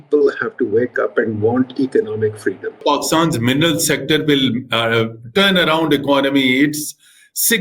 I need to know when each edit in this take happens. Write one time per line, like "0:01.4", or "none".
0:02.8